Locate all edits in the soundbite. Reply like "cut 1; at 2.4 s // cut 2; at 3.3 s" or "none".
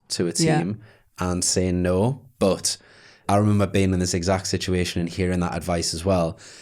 cut 1; at 3.2 s